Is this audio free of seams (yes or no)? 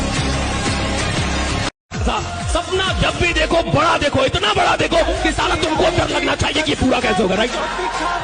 no